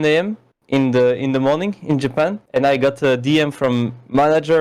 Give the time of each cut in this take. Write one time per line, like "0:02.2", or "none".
none